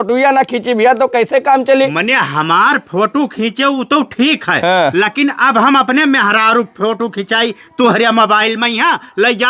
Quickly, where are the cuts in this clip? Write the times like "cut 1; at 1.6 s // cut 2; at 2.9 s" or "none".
none